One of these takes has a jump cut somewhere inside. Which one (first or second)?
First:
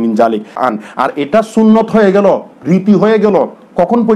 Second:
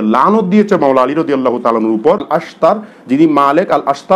second